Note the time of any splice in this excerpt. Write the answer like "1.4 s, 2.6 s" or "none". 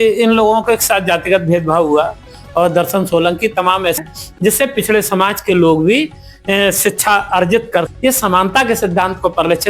4.0 s, 7.9 s